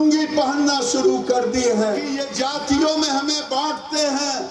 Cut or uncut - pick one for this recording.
cut